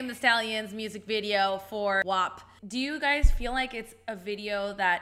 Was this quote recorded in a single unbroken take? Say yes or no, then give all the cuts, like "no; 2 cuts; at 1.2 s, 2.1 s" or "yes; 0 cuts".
no; 1 cut; at 2.3 s